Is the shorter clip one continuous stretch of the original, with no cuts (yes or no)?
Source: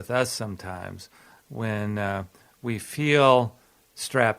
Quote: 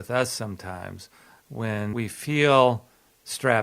no